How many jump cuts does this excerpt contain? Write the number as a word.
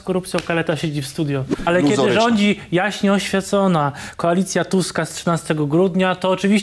one